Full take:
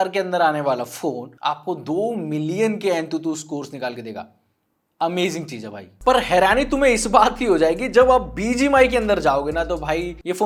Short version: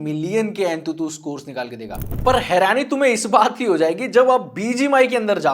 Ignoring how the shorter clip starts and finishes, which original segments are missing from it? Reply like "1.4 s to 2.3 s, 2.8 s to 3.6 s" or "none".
4.3 s to 5.8 s